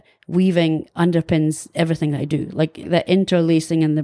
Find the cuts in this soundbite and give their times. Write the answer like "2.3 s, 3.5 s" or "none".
2.9 s

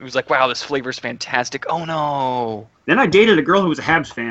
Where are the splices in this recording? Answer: 2.7 s

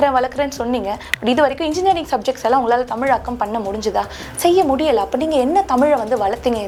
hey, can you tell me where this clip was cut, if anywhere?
none

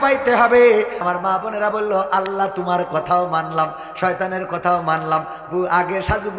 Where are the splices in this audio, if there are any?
1.0 s

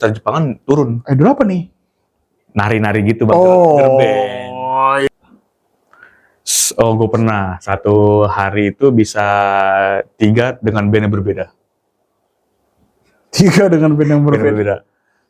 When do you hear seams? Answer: 5.1 s

